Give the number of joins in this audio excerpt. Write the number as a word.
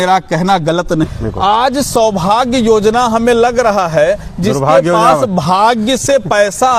one